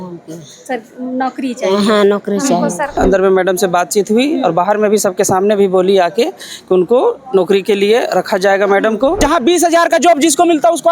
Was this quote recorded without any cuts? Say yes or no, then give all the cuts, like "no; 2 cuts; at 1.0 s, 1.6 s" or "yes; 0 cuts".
no; 2 cuts; at 2.9 s, 9.2 s